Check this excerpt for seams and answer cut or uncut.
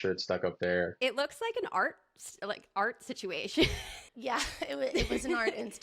cut